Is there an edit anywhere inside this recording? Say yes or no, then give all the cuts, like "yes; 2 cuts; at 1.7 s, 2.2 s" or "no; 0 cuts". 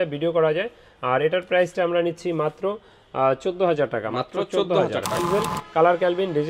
yes; 1 cut; at 5.2 s